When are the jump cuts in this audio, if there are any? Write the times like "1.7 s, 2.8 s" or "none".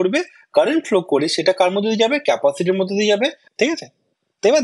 3.4 s